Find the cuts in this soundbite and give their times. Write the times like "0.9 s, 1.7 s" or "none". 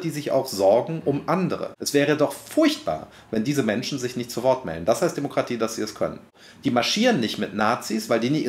1.7 s, 6.3 s

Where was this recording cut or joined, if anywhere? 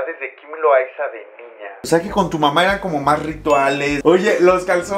1.8 s, 4.0 s

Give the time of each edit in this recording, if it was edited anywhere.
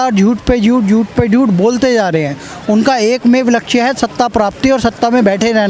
none

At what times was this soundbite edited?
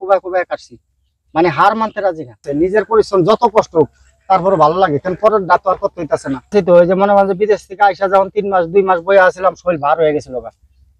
2.5 s, 6.5 s

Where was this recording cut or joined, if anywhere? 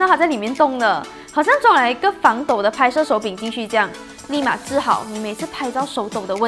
none

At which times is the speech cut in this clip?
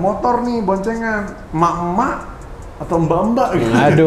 1.4 s

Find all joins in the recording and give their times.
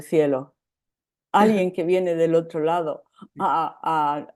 none

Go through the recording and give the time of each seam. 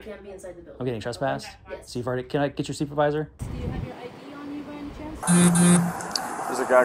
3.4 s, 5.2 s

